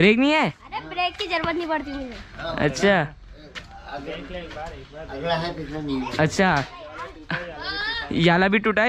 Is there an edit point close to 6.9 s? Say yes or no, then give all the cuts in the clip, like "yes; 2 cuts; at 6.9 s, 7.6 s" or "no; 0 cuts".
no; 0 cuts